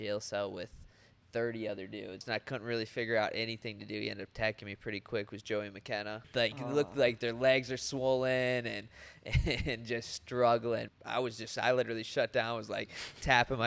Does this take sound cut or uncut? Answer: cut